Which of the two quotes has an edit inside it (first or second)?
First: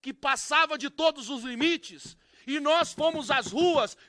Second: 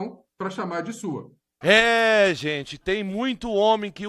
second